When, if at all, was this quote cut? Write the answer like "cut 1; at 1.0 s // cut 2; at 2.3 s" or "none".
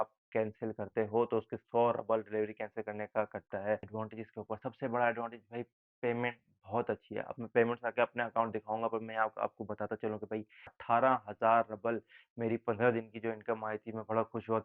cut 1; at 3.8 s // cut 2; at 10.7 s